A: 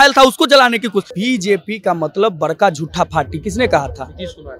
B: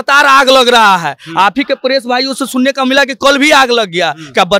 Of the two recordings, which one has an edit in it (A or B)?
A